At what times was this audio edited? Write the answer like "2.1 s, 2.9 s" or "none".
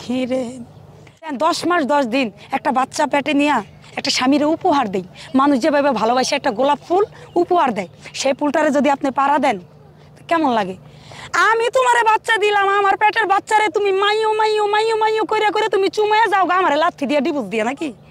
1.3 s